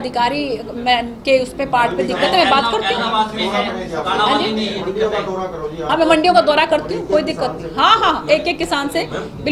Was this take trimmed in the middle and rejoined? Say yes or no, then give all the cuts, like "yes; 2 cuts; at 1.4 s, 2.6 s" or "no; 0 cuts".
no; 0 cuts